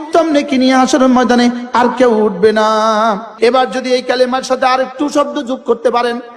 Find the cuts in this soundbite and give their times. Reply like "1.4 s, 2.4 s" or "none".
none